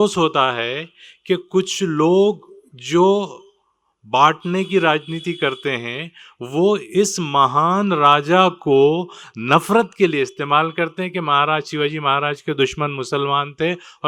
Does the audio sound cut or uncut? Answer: uncut